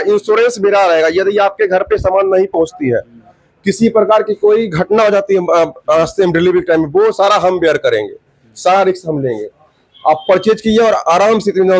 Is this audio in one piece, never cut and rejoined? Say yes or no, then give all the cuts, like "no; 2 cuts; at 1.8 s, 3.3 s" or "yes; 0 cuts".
yes; 0 cuts